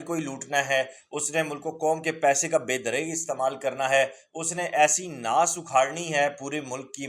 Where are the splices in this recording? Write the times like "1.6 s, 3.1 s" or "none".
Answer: none